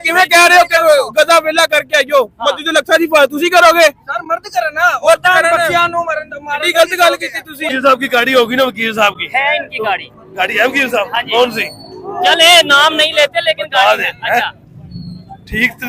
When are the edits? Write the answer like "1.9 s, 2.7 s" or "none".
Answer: 7.7 s